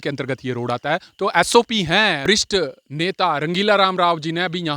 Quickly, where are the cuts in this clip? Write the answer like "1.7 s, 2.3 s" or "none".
2.2 s